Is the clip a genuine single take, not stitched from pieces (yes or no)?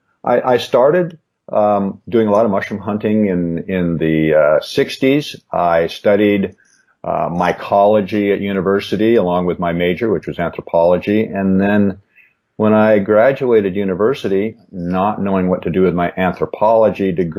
yes